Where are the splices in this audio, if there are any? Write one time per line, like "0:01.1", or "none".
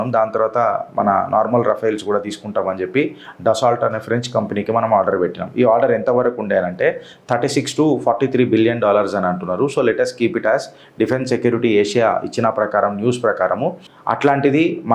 0:13.9